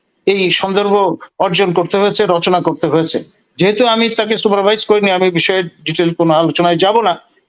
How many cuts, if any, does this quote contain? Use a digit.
0